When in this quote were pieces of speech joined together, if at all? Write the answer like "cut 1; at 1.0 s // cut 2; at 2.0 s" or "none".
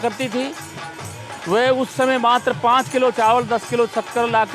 none

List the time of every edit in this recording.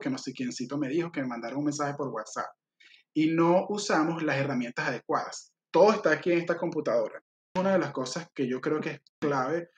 cut 1; at 7.5 s

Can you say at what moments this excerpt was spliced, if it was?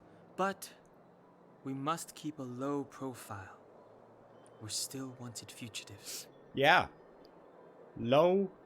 cut 1; at 6.4 s

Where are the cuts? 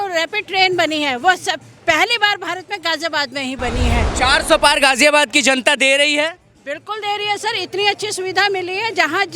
cut 1; at 4.1 s

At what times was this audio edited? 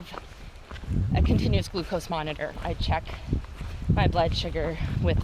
cut 1; at 2.6 s

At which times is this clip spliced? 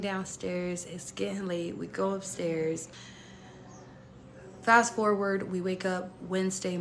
cut 1; at 3.0 s

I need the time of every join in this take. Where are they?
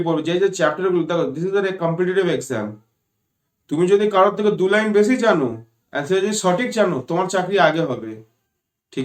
none

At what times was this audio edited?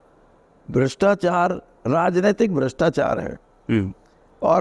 none

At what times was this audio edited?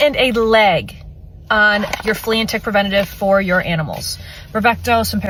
none

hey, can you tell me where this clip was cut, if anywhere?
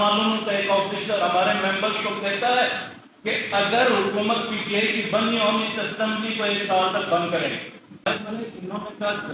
cut 1; at 8.1 s

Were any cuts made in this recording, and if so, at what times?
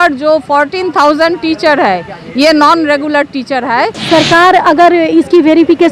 cut 1; at 3.9 s

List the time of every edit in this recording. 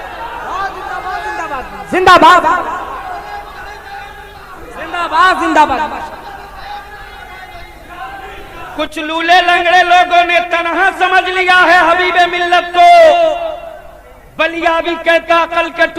cut 1; at 8.7 s

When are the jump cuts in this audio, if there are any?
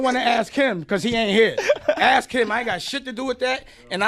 none

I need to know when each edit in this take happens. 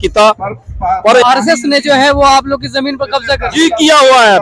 cut 1; at 1.2 s

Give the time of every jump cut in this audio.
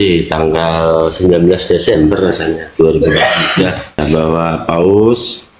cut 1; at 4.0 s

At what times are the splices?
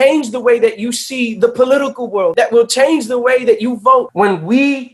cut 1; at 2.3 s // cut 2; at 4.1 s

